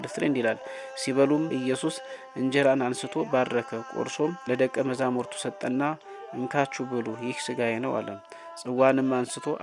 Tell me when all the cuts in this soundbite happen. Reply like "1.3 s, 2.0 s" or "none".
1.5 s, 4.4 s

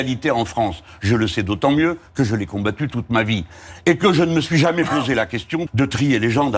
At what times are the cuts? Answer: 5.7 s

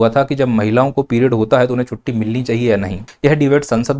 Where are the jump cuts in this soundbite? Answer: 3.0 s

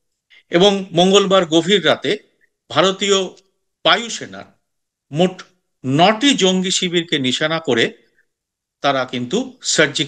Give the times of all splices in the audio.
none

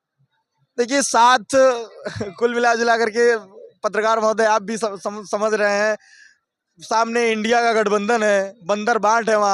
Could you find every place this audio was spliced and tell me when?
none

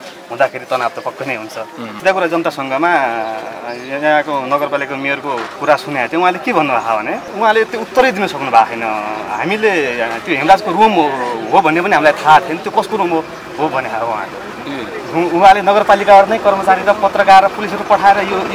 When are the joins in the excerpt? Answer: 1.9 s, 5.5 s, 7.3 s

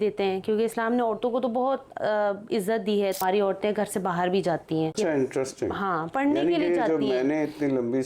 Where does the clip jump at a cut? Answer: 3.2 s, 4.9 s

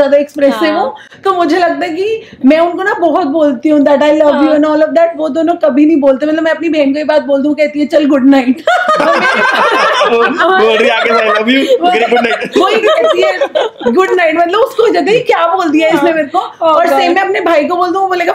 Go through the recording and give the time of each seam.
none

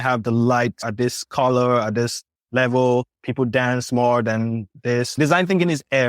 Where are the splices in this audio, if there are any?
3.2 s, 4.7 s

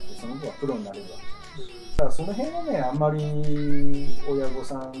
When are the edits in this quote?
2.0 s

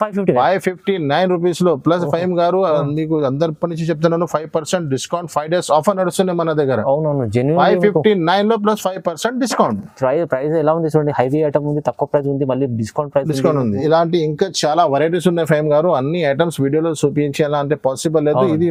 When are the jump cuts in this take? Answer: none

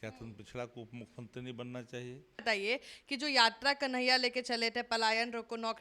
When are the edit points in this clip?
2.4 s

